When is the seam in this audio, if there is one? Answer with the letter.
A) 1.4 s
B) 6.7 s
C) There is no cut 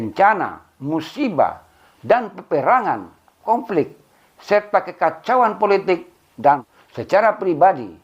B